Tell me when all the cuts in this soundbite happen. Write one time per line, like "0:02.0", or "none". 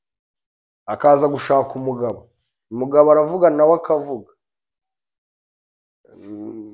none